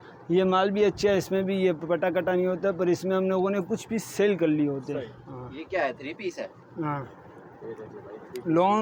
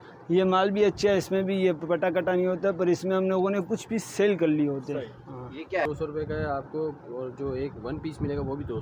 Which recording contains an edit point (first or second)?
second